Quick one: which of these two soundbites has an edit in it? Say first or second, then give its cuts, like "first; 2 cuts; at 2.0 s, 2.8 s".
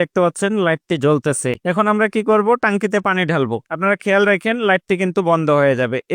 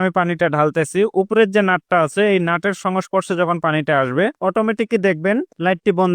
first; 1 cut; at 1.6 s